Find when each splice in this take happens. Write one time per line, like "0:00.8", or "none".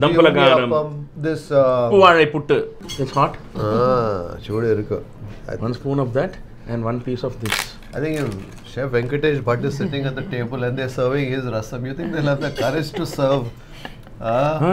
0:01.0
0:02.8